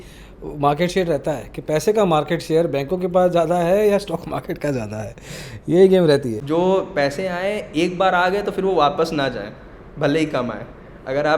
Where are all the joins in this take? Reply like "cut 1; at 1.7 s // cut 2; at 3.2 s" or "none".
cut 1; at 6.3 s